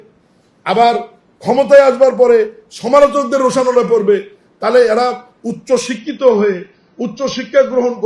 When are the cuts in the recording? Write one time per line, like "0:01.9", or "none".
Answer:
none